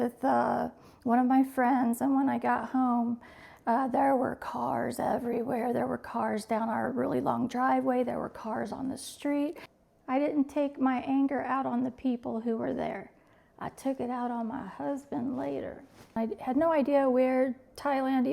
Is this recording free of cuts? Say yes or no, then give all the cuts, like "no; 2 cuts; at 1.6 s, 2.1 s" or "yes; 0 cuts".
no; 2 cuts; at 9.7 s, 16.2 s